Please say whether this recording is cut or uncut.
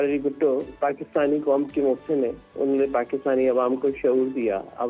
uncut